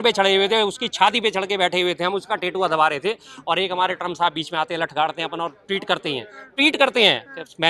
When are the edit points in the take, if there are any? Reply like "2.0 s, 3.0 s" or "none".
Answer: none